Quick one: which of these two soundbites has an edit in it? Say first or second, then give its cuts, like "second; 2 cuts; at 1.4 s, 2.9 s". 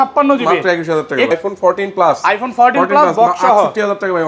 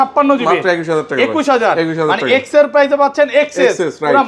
first; 1 cut; at 1.3 s